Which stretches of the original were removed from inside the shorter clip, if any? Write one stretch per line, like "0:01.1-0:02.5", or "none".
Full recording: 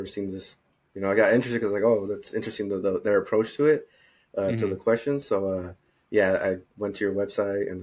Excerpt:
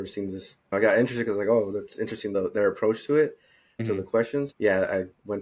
0:00.7-0:01.1
0:02.7-0:02.8
0:04.5-0:05.5